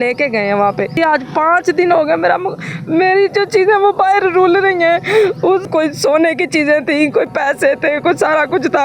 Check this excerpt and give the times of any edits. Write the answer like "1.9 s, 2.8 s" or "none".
0.9 s, 5.6 s

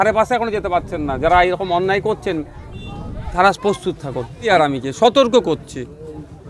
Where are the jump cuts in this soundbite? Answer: 4.4 s

